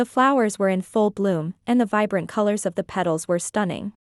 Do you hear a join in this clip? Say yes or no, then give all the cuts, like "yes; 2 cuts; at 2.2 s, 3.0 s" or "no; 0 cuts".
no; 0 cuts